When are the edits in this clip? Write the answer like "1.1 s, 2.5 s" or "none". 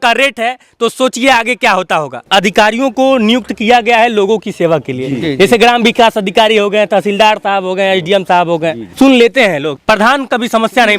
2.3 s, 8.8 s, 9.7 s

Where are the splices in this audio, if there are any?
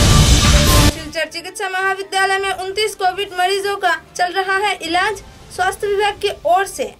0.9 s

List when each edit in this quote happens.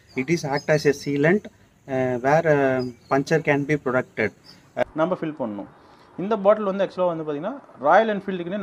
4.8 s

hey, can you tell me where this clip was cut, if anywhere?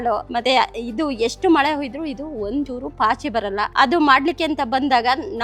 3.7 s

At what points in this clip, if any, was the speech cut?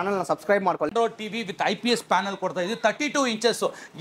0.9 s

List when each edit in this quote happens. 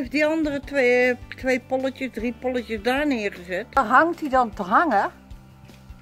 3.8 s, 5.1 s

